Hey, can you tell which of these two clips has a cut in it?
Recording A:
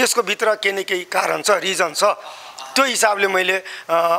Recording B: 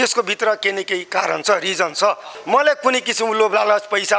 B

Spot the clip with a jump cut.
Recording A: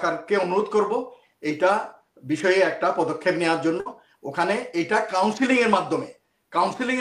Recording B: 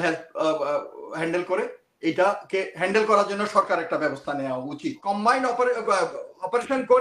B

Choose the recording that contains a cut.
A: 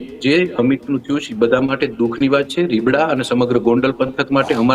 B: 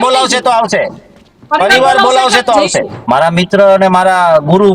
B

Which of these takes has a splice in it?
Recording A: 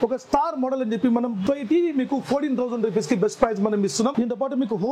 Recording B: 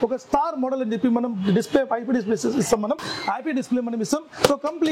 A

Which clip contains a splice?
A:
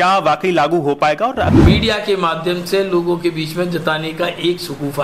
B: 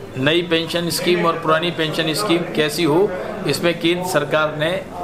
A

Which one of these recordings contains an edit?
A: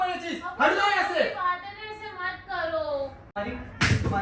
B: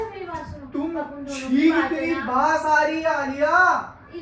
A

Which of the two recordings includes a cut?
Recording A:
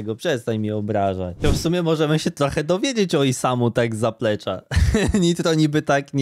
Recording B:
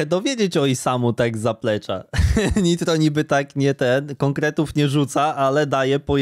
A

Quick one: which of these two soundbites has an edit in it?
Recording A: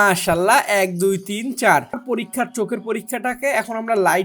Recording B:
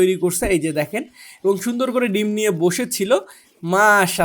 A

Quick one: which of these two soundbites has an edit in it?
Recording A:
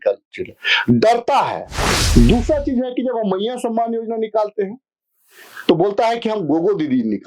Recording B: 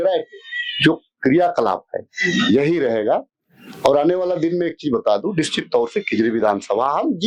A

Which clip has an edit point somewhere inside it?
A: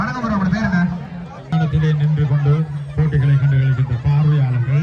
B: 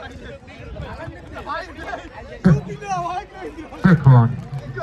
A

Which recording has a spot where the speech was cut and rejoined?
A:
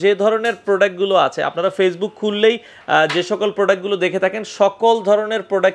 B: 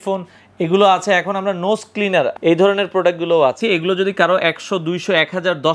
B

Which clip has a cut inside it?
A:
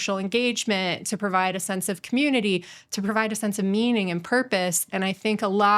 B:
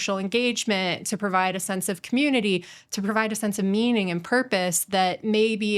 A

